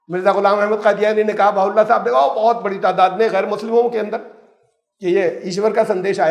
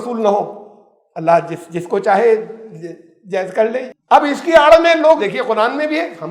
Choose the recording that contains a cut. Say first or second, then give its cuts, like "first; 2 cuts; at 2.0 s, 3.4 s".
second; 2 cuts; at 3.9 s, 5.2 s